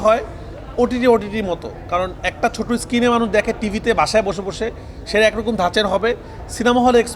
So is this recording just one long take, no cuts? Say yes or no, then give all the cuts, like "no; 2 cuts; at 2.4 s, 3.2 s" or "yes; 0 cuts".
yes; 0 cuts